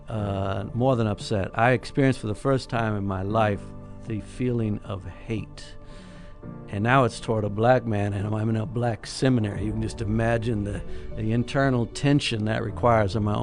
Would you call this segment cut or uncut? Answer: uncut